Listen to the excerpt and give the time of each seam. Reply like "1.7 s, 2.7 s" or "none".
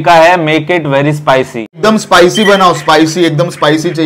1.8 s

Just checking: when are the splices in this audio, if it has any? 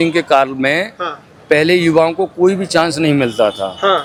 none

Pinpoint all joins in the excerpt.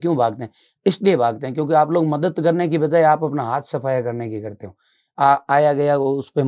none

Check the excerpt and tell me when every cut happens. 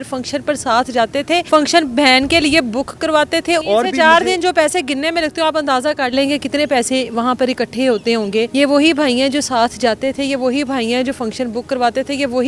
1.4 s, 3.6 s, 8.5 s

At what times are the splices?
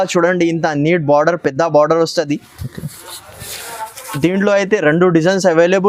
none

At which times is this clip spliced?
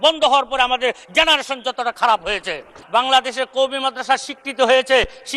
2.8 s

